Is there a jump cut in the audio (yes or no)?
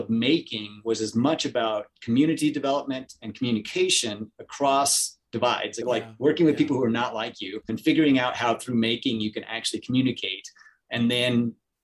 no